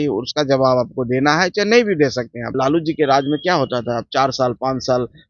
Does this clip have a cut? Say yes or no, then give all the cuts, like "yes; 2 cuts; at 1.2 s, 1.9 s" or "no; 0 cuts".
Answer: yes; 1 cut; at 2.5 s